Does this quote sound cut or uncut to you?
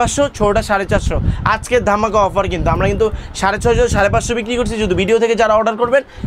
uncut